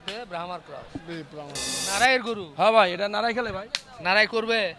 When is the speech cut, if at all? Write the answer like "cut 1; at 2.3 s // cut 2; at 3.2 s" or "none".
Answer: cut 1; at 1.8 s